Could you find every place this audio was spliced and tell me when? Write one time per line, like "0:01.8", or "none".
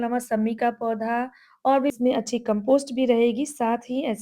0:02.0